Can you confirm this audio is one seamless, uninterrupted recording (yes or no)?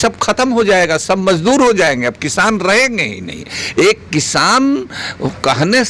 yes